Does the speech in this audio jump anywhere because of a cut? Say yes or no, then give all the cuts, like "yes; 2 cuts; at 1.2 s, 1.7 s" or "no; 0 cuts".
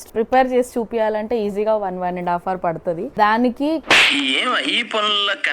yes; 1 cut; at 3.1 s